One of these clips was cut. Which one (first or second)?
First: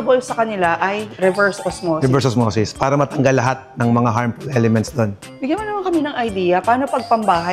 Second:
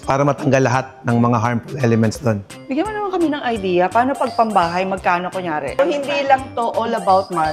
second